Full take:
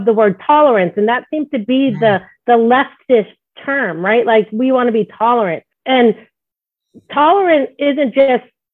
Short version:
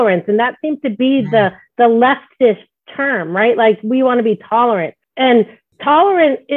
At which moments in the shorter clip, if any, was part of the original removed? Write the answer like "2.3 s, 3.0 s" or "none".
5.6 s